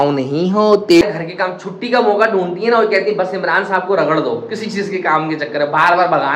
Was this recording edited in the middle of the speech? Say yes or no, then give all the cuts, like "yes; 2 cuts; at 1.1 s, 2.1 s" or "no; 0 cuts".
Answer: yes; 1 cut; at 1.0 s